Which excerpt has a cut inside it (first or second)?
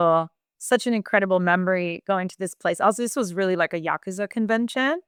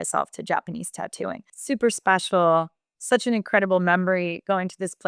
second